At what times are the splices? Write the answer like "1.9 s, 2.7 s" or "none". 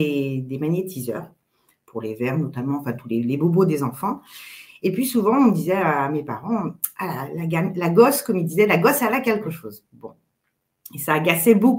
none